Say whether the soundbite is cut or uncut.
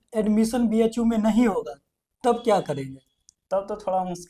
uncut